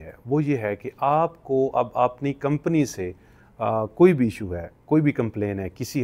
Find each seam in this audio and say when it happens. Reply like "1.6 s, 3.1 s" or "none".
none